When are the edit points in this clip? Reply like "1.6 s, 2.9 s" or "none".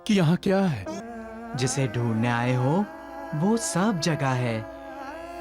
1.0 s